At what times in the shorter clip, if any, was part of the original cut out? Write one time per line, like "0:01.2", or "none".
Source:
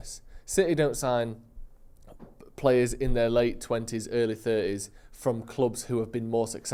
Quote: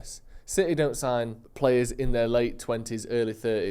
0:01.4